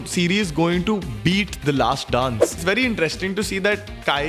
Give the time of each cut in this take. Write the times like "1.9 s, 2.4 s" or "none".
2.6 s